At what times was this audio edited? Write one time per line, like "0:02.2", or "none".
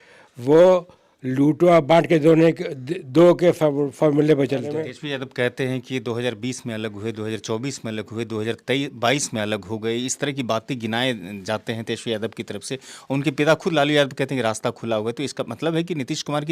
0:04.7